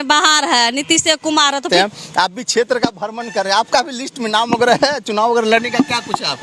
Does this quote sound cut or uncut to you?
cut